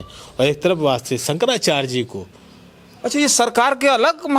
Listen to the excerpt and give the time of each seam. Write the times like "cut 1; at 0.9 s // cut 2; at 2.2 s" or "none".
none